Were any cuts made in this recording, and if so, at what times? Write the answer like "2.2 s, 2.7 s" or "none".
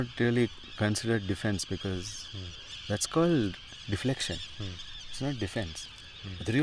none